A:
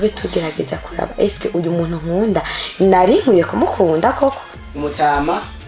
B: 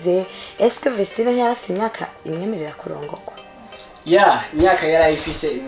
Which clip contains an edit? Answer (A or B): A